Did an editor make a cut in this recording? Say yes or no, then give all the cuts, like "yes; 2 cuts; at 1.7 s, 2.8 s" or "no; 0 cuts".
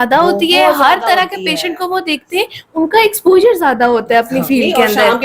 no; 0 cuts